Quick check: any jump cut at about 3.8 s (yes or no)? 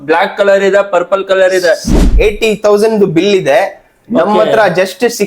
no